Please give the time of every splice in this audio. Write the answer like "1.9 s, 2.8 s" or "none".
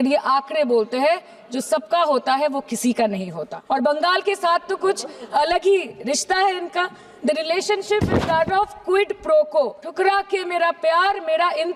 none